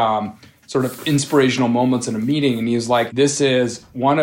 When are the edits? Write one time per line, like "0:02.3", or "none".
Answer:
0:03.1